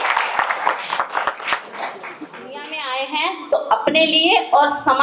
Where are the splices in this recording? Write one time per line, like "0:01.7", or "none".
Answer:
0:02.9